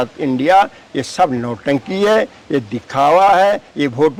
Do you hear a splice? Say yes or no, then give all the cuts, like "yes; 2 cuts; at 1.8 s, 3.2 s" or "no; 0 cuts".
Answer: no; 0 cuts